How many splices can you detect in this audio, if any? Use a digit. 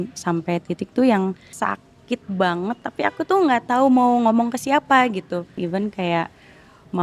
2